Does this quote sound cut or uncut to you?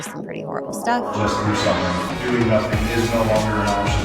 cut